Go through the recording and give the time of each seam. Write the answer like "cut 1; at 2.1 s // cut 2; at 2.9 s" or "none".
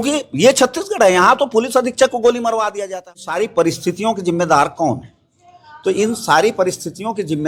cut 1; at 2.9 s